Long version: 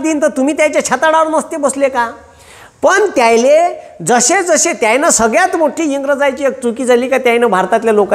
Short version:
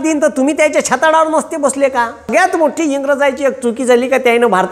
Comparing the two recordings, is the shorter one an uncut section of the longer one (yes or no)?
no